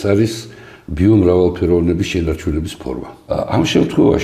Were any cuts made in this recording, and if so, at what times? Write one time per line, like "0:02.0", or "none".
0:03.3